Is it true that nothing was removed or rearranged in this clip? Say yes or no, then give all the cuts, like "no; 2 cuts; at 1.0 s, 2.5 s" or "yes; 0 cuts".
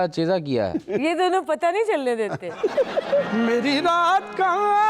no; 1 cut; at 3.2 s